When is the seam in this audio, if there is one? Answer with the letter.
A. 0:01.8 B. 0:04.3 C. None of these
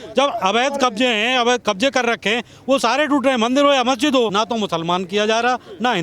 B